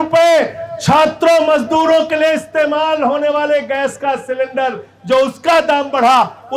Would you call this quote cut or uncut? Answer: uncut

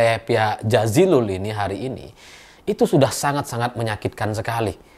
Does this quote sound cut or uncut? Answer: uncut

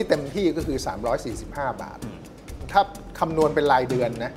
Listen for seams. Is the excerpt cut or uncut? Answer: cut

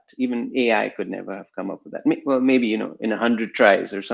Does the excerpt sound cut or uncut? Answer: uncut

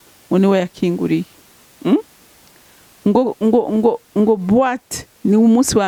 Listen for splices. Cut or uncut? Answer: uncut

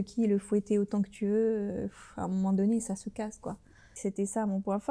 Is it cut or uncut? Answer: cut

